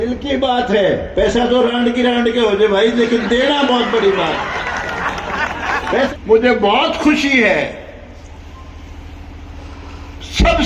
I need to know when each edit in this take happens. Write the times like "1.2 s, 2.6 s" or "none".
6.1 s